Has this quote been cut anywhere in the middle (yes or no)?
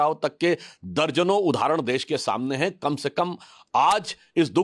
no